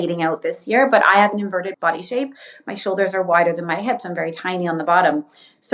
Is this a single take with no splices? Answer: no; 1 cut; at 1.8 s

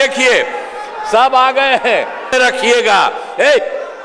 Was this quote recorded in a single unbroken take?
no; 1 cut; at 2.3 s

